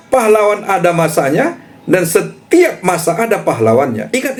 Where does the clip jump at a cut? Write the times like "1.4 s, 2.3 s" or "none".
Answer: none

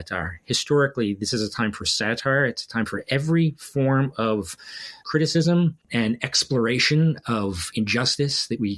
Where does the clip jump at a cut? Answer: none

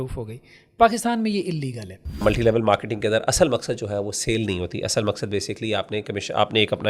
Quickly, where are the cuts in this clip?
2.2 s

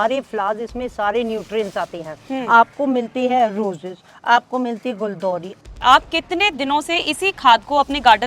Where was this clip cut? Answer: 5.6 s

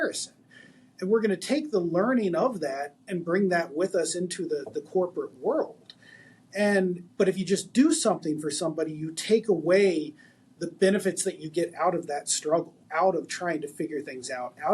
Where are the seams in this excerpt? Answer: 7.0 s, 12.8 s

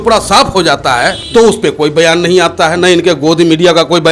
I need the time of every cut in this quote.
1.2 s

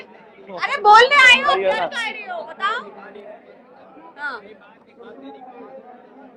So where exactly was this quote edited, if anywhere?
none

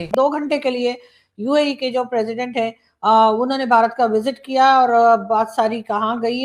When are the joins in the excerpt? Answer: none

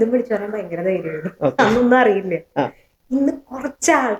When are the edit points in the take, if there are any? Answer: none

